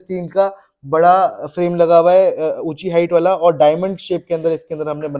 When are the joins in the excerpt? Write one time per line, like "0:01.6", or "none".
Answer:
none